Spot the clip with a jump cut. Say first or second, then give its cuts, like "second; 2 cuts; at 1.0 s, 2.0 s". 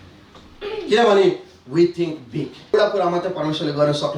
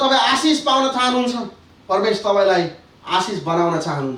first; 1 cut; at 2.7 s